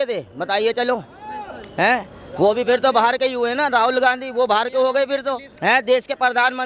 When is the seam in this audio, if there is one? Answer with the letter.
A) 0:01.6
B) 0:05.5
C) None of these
B